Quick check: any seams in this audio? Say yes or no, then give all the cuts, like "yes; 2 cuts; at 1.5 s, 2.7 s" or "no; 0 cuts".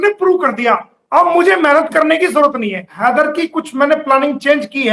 yes; 1 cut; at 2.9 s